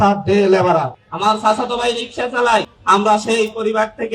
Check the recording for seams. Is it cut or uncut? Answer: cut